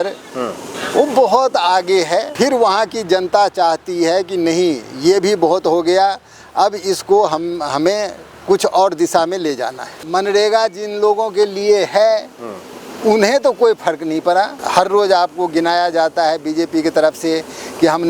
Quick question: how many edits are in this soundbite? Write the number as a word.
three